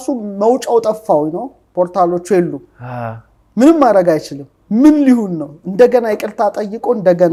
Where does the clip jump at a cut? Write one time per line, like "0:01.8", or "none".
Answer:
none

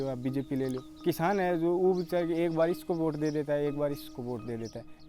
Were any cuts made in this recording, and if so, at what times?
0:01.0

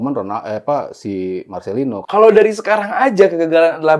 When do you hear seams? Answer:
0:02.0

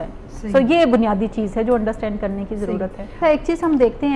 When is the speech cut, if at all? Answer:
0:03.2

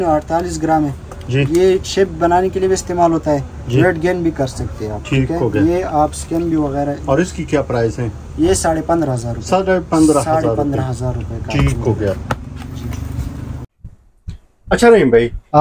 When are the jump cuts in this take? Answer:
none

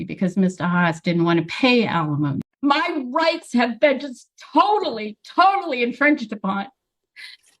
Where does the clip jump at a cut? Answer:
0:02.5

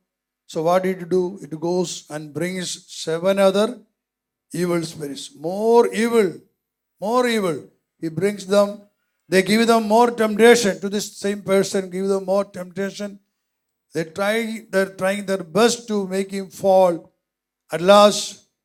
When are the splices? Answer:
none

